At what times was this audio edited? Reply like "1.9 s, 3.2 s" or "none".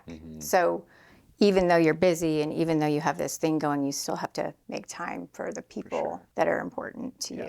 6.2 s